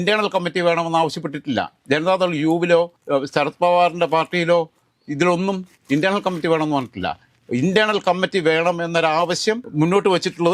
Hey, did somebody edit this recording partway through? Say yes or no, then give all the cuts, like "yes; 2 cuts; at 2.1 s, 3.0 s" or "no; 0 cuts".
no; 0 cuts